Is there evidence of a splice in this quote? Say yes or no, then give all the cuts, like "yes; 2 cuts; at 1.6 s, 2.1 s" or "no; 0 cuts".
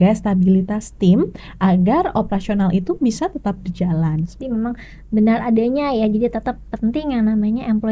no; 0 cuts